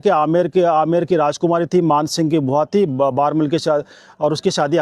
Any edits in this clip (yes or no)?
no